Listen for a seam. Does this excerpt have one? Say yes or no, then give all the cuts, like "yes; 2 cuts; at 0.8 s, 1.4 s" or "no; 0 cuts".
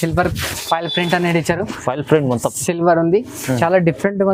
no; 0 cuts